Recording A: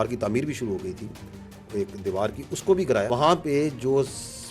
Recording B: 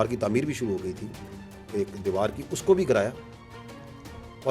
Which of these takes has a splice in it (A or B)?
A